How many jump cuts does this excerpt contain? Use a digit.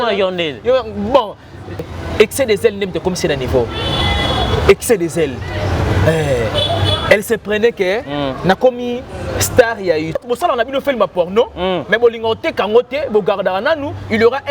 2